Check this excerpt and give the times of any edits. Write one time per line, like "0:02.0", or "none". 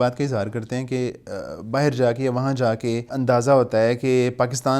0:03.1